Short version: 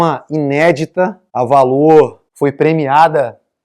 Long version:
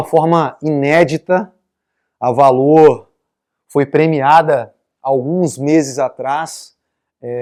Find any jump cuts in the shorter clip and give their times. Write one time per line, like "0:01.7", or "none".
0:01.2
0:02.2

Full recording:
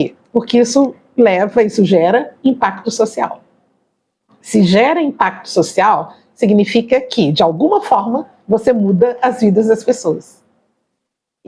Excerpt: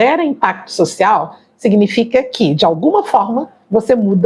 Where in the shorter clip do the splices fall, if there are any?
none

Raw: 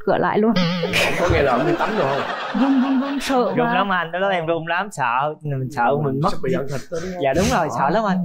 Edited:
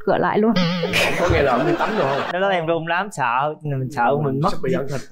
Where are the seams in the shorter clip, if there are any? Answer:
0:02.3

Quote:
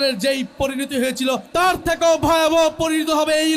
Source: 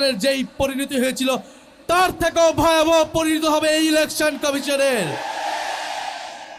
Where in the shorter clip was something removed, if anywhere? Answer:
0:01.5

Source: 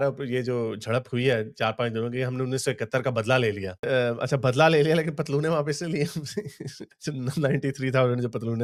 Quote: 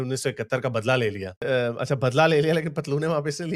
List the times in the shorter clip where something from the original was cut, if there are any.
none

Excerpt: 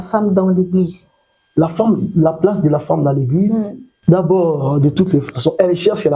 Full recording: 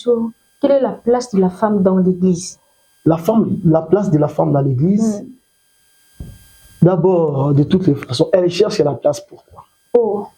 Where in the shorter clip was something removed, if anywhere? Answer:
0:03.8

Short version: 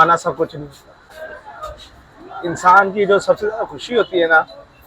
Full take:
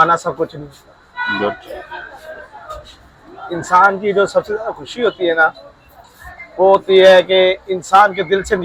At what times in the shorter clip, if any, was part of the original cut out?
0:01.0

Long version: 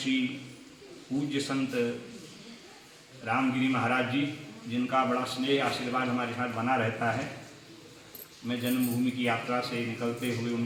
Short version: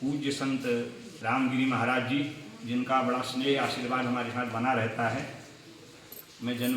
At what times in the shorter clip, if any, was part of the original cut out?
0:01.0

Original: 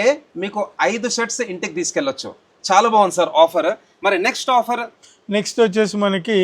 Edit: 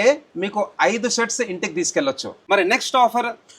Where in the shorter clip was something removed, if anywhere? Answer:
0:02.3

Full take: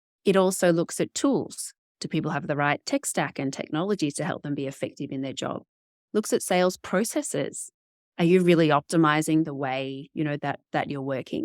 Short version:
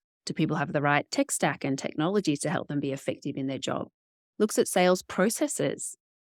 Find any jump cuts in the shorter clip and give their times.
none

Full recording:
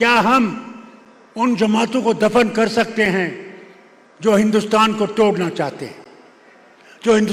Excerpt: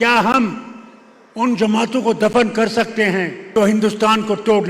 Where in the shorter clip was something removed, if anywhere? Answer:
0:03.4

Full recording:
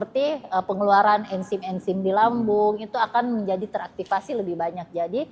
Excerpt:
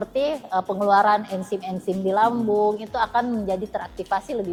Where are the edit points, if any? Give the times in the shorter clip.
none

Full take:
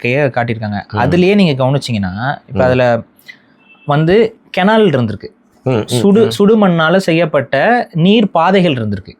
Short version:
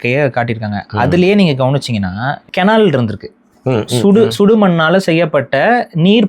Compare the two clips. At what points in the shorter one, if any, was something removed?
0:02.4

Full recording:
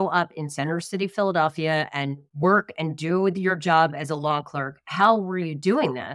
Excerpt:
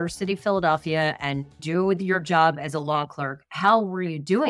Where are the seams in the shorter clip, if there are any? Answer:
0:01.5

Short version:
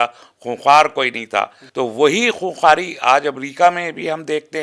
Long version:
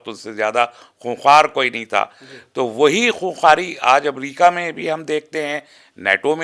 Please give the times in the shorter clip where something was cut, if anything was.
0:01.6

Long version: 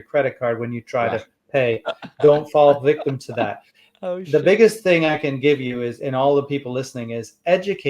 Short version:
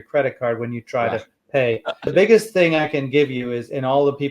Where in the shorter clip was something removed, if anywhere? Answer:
0:02.1

